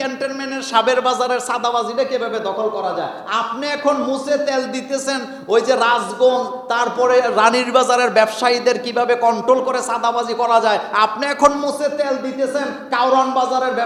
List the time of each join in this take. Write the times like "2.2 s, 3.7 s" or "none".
none